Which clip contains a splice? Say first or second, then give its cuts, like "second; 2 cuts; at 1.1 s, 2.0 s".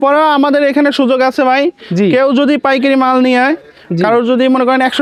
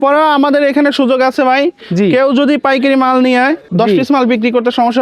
second; 1 cut; at 3.7 s